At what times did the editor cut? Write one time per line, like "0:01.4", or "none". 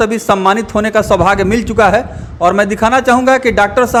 none